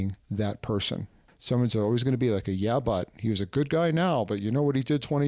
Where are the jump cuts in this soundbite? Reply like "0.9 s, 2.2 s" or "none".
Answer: 1.3 s